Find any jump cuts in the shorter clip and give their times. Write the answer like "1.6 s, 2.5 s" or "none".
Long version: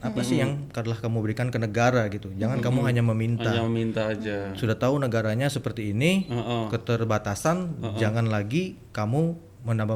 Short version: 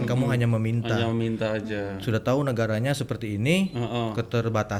none